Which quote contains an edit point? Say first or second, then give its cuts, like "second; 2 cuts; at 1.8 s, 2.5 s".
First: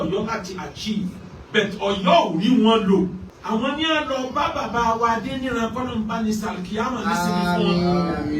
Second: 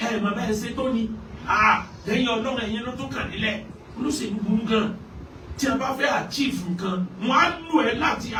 first; 1 cut; at 3.3 s